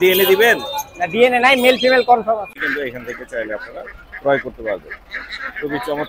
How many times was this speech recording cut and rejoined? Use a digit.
1